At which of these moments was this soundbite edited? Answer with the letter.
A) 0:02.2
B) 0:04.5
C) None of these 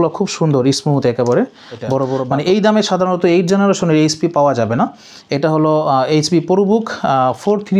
A